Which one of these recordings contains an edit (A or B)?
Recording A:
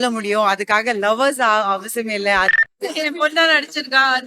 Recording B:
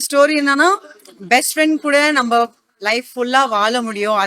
A